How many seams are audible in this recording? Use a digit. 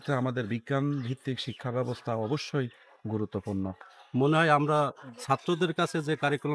1